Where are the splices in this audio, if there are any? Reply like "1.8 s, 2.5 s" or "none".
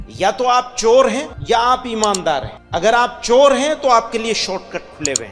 1.3 s, 2.6 s